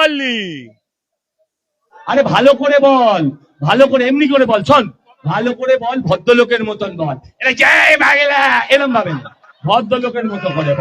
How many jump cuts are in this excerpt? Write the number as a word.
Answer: one